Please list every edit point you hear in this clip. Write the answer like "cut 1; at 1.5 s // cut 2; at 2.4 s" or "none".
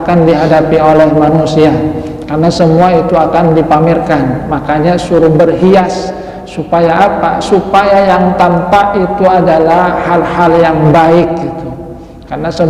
none